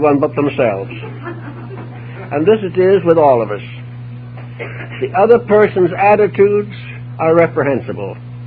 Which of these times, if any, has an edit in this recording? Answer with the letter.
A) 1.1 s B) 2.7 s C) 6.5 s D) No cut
B